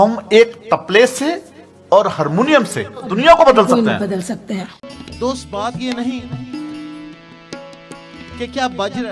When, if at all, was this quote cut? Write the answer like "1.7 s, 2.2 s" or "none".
3.1 s, 5.0 s

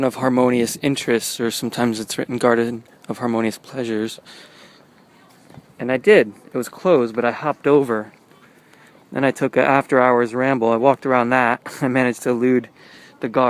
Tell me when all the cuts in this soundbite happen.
10.2 s

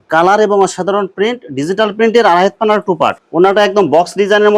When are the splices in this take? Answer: 3.2 s

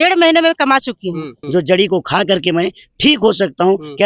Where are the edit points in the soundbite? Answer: 1.4 s

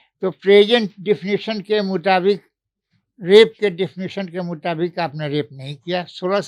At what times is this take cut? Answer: none

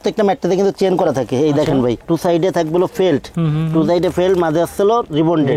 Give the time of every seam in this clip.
none

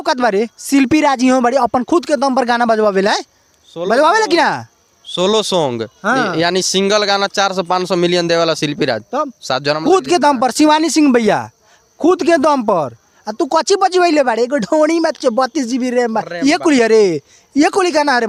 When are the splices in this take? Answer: none

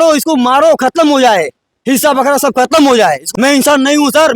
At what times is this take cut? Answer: 3.2 s

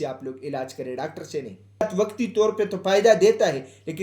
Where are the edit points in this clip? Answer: 1.9 s

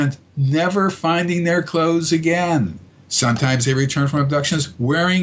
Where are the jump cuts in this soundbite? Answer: none

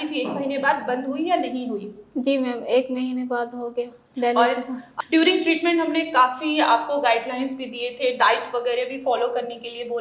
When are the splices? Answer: 4.9 s

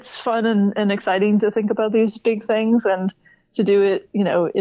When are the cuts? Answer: none

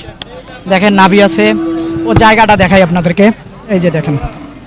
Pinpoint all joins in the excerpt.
none

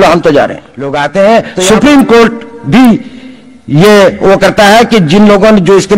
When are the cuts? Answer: 1.0 s

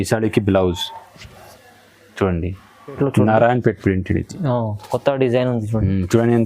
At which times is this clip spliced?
3.0 s

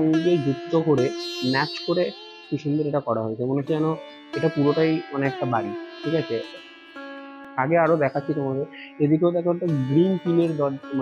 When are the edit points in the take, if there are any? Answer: none

